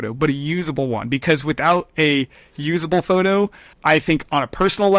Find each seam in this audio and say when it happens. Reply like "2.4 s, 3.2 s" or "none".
3.7 s